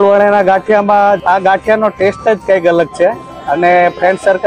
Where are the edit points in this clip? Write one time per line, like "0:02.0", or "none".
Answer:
0:01.2